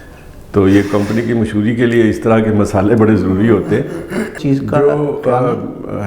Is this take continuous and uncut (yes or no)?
no